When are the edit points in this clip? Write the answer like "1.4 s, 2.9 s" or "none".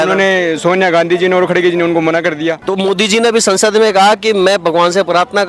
2.7 s

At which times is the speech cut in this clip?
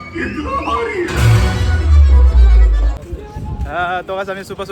2.9 s

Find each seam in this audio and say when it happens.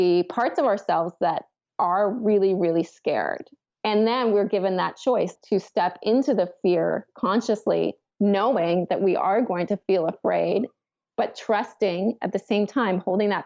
5.3 s

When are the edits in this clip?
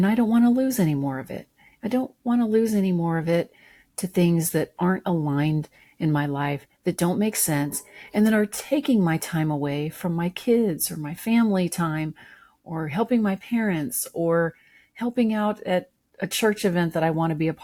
none

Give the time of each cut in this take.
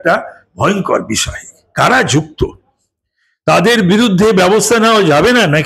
none

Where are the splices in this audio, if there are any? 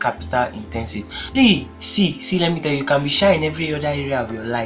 1.2 s

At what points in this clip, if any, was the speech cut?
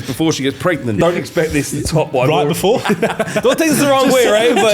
1.0 s, 2.9 s

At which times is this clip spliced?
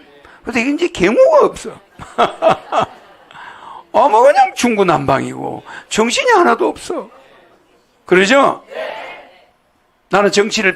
none

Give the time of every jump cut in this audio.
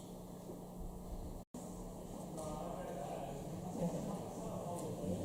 none

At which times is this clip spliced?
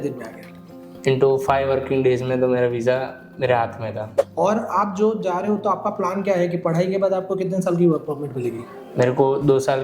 4.1 s

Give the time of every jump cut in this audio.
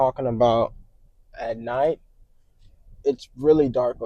none

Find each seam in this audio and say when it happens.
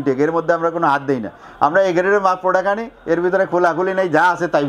none

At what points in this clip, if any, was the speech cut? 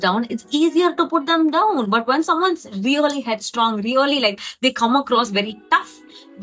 none

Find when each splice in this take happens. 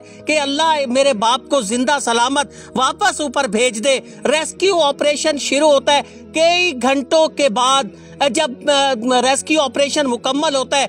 none

